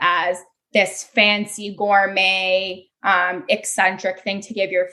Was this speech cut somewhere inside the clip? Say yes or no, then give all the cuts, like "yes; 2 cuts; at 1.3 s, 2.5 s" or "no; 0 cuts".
no; 0 cuts